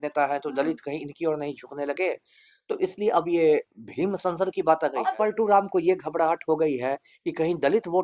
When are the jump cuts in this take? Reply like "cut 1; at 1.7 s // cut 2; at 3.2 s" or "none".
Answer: cut 1; at 5.0 s